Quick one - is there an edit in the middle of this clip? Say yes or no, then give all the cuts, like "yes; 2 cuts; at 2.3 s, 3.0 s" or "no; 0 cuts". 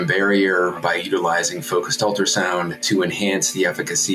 yes; 2 cuts; at 0.8 s, 2.8 s